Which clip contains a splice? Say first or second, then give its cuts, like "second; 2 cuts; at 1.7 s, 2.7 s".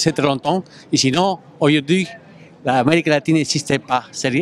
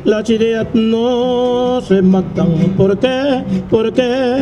first; 1 cut; at 2.9 s